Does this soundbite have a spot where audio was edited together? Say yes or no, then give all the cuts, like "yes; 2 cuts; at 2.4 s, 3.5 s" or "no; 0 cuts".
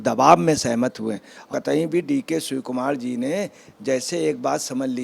yes; 1 cut; at 1.5 s